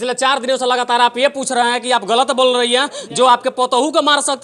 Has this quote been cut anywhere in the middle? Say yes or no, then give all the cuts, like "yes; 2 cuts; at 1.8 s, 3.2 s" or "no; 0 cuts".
no; 0 cuts